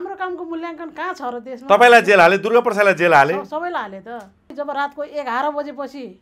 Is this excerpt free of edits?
no; 1 cut; at 4.5 s

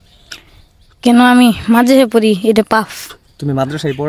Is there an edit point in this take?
no; 0 cuts

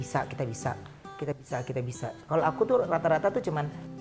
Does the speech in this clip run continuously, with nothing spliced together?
yes; 0 cuts

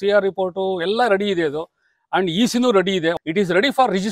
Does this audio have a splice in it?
yes; 1 cut; at 3.2 s

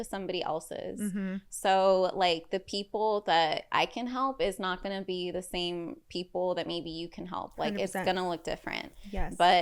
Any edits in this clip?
no; 0 cuts

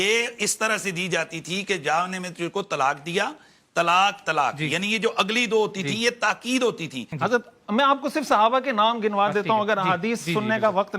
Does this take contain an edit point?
yes; 1 cut; at 7.0 s

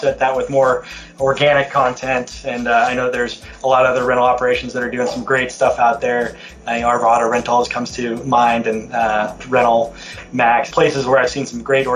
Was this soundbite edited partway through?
yes; 1 cut; at 10.7 s

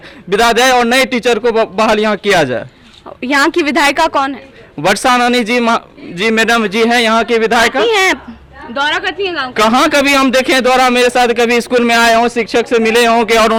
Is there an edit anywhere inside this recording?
no; 0 cuts

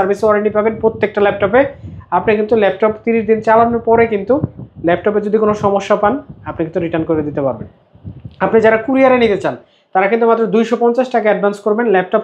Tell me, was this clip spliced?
no; 0 cuts

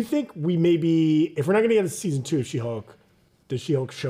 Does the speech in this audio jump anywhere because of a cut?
no; 0 cuts

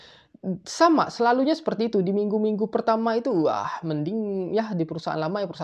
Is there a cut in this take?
no; 0 cuts

